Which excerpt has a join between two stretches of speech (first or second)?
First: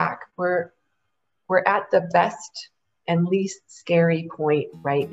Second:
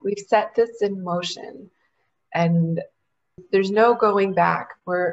second